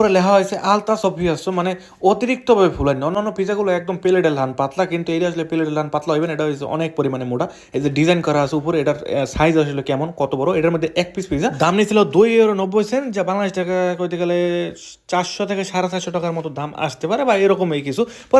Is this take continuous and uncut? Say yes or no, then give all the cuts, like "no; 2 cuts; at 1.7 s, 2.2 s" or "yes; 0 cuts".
yes; 0 cuts